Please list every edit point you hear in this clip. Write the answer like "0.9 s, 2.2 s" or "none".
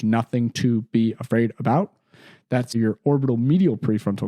2.8 s